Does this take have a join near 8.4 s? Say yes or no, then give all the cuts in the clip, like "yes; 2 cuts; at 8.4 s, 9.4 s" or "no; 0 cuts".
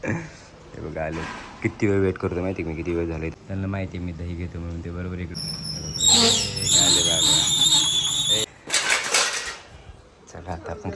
yes; 3 cuts; at 3.3 s, 5.3 s, 8.4 s